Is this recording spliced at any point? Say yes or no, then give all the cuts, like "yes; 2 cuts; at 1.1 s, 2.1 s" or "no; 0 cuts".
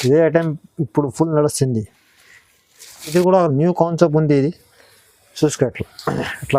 no; 0 cuts